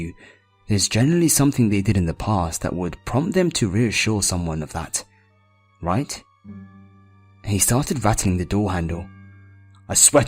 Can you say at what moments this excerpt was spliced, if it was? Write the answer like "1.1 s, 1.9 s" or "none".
2.7 s